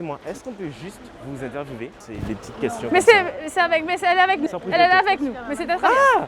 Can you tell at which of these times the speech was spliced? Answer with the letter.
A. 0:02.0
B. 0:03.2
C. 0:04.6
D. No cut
A